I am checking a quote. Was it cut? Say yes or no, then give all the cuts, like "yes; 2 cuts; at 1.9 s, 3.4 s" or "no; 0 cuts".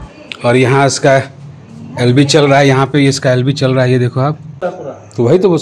yes; 1 cut; at 4.7 s